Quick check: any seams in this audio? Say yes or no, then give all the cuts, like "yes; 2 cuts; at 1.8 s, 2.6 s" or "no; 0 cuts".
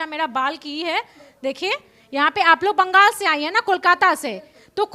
no; 0 cuts